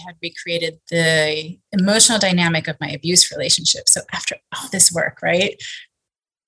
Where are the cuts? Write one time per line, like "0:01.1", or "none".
0:01.5